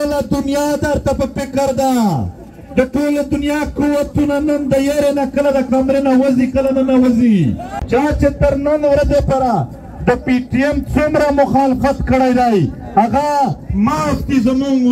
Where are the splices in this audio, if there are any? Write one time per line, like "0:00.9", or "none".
0:07.7